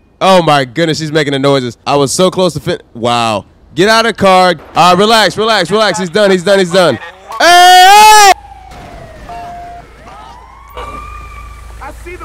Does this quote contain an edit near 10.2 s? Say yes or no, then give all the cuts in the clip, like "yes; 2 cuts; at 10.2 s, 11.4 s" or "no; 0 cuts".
no; 3 cuts; at 1.8 s, 4.6 s, 8.3 s